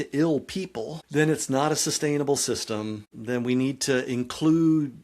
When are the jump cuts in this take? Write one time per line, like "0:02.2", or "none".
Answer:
0:01.0
0:03.1